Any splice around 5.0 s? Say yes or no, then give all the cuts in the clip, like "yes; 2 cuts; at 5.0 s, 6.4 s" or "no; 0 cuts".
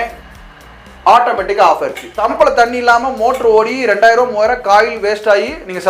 no; 1 cut; at 2.1 s